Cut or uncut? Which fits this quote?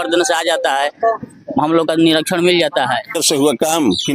cut